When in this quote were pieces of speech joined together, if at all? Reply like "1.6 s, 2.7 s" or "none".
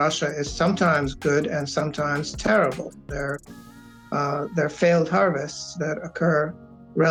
none